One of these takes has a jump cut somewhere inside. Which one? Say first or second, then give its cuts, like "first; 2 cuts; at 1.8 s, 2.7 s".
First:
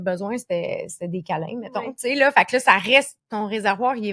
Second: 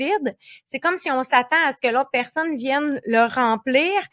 first; 1 cut; at 3.2 s